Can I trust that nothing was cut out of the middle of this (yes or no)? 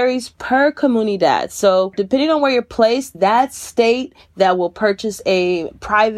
no